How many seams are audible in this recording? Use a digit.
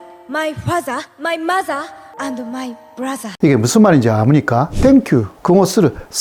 3